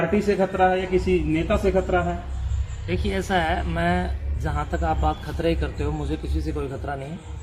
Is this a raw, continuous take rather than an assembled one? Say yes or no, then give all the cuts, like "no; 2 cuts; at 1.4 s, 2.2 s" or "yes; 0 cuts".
yes; 0 cuts